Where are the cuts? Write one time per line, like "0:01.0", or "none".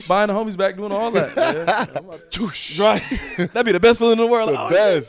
0:02.2
0:03.5